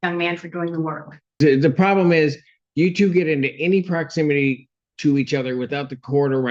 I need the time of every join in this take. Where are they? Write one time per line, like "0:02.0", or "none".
0:01.4